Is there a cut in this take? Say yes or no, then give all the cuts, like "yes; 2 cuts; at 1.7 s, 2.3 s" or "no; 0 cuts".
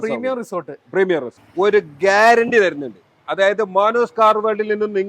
yes; 1 cut; at 1.4 s